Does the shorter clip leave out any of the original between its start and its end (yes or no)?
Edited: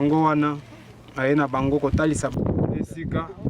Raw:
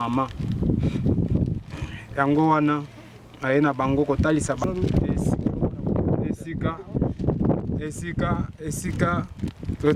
yes